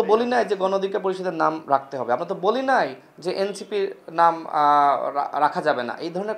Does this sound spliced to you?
no; 0 cuts

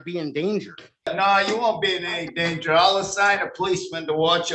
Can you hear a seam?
yes; 1 cut; at 1.1 s

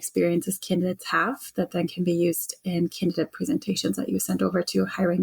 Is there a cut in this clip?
no; 0 cuts

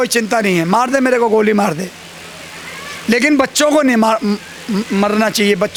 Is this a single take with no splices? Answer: yes; 0 cuts

